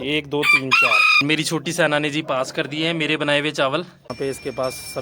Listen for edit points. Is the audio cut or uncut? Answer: cut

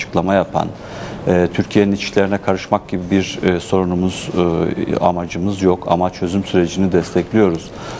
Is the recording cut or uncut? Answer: cut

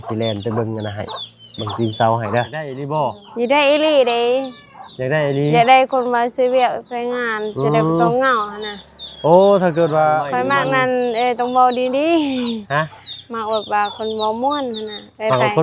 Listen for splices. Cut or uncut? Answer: cut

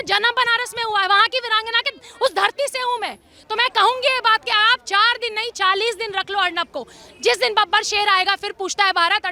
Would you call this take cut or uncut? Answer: uncut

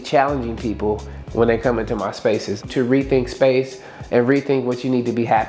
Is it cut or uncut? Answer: uncut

